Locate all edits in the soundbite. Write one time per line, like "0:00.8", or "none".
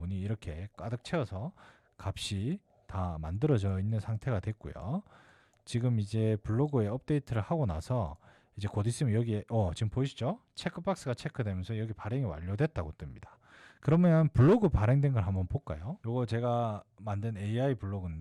none